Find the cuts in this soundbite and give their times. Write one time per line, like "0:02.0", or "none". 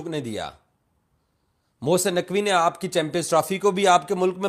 none